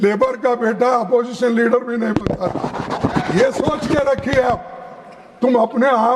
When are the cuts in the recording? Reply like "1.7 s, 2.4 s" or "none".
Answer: none